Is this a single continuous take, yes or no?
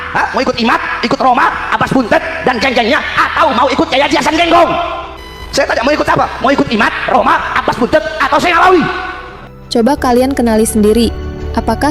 yes